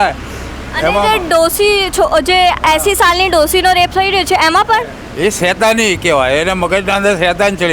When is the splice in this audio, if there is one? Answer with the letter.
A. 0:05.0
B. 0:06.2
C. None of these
A